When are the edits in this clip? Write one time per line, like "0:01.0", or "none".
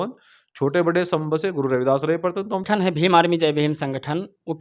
0:02.7